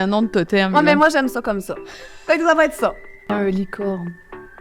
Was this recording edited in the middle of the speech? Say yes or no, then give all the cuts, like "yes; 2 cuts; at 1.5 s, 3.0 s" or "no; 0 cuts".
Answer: yes; 1 cut; at 3.3 s